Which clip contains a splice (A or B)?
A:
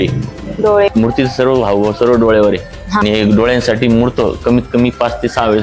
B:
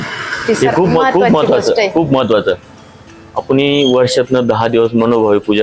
A